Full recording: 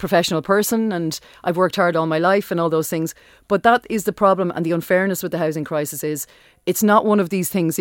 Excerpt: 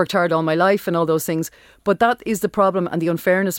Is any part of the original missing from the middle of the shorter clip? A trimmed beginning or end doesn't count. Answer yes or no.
no